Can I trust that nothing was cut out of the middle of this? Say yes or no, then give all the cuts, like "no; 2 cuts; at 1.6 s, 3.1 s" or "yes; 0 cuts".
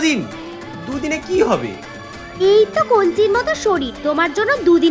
yes; 0 cuts